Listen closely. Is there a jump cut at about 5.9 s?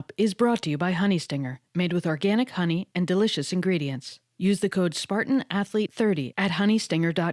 no; 0 cuts

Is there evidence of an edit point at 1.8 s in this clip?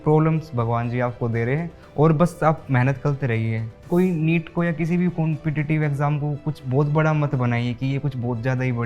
no; 1 cut; at 3.8 s

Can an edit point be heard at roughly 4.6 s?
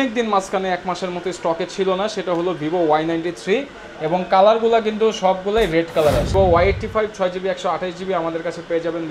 no; 1 cut; at 6.3 s

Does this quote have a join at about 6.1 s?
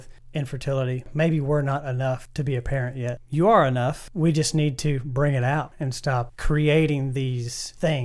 no; 1 cut; at 4.0 s

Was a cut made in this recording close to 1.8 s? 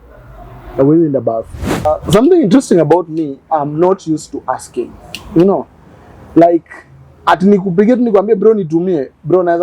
yes; 1 cut; at 1.8 s

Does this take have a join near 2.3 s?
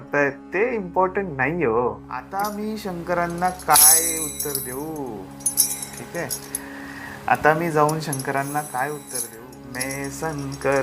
yes; 2 cuts; at 2.3 s, 9.2 s

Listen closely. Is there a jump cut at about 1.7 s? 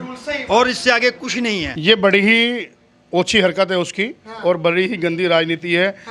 yes; 1 cut; at 1.7 s

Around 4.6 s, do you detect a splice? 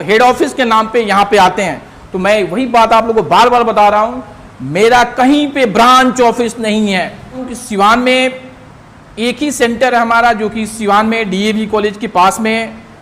no; 1 cut; at 7.5 s

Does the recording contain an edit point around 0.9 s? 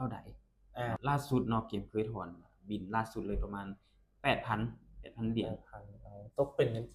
yes; 1 cut; at 0.9 s

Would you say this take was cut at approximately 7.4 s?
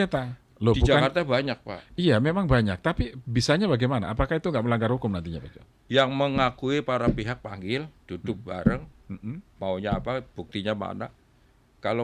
no; 0 cuts

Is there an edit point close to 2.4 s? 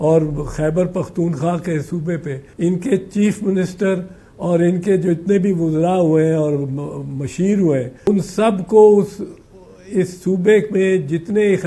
yes; 2 cuts; at 2.4 s, 8.1 s

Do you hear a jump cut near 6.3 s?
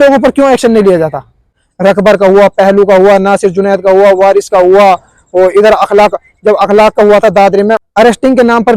no; 2 cuts; at 1.6 s, 7.8 s

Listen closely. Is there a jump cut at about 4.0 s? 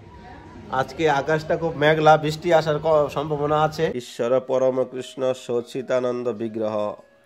yes; 1 cut; at 4.0 s

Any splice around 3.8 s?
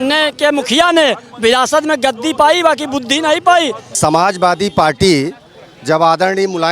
yes; 1 cut; at 3.8 s

